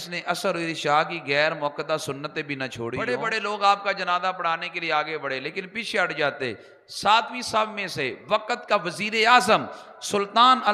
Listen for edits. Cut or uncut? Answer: cut